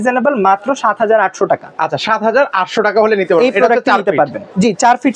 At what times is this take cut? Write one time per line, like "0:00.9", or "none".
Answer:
none